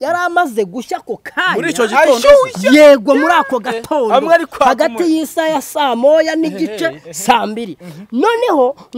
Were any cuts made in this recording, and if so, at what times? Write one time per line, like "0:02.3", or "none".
none